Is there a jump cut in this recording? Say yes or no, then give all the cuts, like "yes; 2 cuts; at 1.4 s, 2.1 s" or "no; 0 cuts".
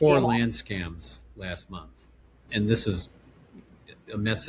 yes; 1 cut; at 2.5 s